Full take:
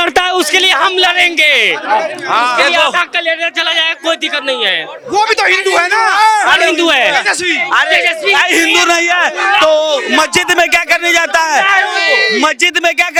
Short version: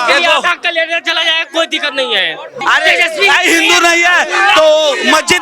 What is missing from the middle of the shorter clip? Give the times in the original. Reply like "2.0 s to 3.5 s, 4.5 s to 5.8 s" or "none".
5.0 s to 7.6 s